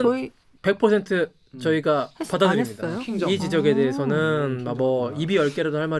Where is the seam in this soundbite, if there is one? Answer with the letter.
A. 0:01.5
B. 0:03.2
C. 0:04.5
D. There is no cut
D